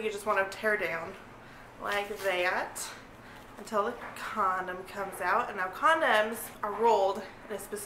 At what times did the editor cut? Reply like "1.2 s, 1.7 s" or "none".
6.5 s